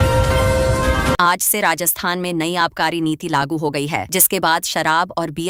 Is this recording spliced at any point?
no; 0 cuts

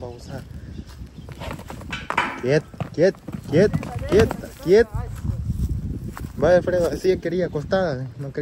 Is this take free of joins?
yes; 0 cuts

